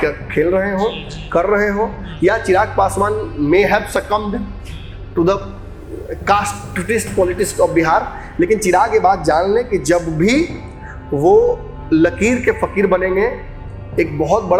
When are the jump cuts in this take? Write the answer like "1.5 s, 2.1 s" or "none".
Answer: none